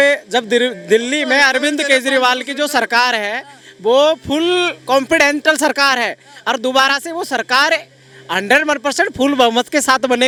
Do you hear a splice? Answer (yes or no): no